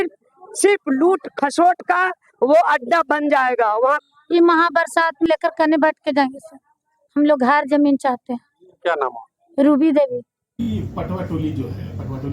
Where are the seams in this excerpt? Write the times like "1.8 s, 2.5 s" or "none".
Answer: 4.1 s, 10.6 s